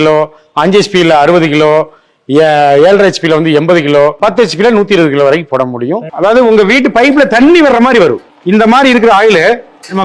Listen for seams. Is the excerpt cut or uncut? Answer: cut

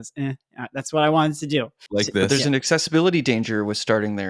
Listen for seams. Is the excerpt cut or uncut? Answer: cut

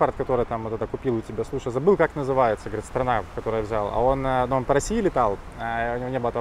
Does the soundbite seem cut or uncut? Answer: uncut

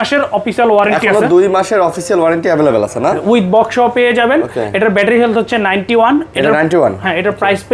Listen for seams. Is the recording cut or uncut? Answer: uncut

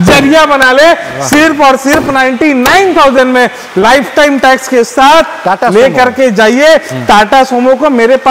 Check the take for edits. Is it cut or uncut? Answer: uncut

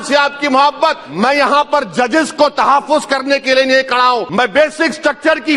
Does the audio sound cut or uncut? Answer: cut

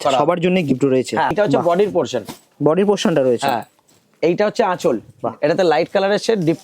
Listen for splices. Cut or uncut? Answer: cut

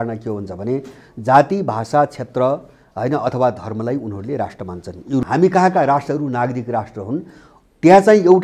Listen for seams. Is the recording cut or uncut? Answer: cut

